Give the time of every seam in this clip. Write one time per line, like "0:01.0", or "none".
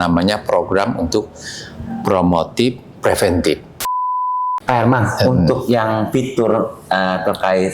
0:04.1